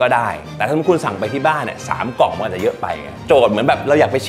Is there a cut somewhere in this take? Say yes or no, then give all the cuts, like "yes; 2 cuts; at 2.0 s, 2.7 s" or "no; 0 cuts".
yes; 1 cut; at 3.2 s